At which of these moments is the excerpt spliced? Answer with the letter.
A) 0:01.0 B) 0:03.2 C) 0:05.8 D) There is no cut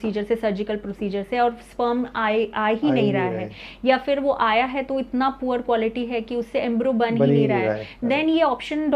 D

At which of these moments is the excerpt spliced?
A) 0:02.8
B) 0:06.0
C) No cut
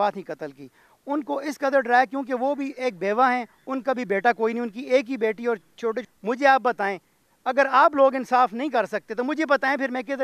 B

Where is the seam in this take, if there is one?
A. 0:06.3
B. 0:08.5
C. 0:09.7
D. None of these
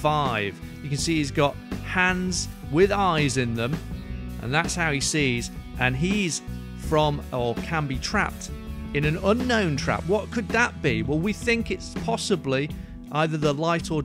D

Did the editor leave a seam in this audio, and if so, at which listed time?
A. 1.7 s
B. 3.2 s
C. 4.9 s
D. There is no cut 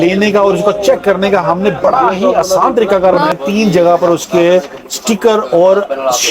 B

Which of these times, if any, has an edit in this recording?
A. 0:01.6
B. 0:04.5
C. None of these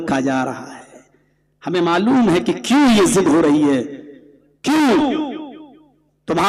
C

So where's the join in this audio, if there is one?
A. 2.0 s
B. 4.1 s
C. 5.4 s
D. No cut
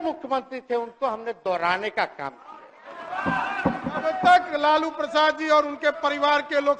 B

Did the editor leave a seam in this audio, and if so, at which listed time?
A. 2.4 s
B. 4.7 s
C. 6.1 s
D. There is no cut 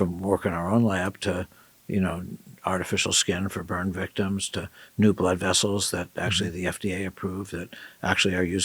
D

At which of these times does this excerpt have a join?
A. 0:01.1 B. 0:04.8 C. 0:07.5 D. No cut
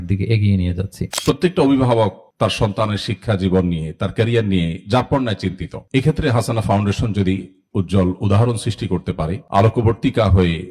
A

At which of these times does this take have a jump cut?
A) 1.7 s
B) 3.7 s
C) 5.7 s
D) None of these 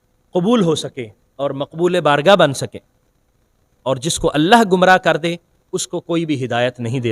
B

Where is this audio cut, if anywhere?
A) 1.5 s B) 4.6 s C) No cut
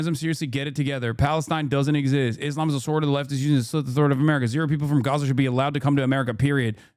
C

